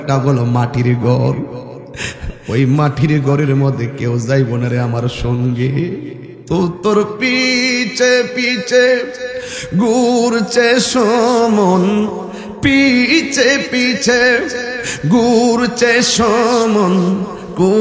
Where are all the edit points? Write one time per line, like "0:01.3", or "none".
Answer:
none